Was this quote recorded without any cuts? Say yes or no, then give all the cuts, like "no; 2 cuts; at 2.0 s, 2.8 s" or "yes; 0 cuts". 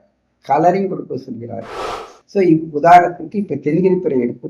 no; 1 cut; at 1.9 s